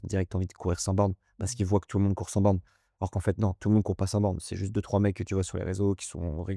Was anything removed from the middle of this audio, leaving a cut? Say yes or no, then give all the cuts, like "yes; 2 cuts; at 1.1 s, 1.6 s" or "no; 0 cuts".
no; 0 cuts